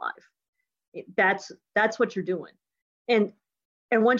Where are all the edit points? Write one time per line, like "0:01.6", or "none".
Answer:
none